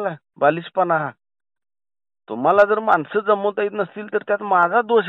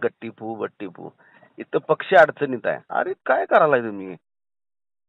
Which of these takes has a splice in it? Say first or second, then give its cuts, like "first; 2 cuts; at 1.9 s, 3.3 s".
second; 1 cut; at 2.8 s